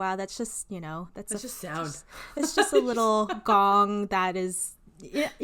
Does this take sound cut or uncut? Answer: uncut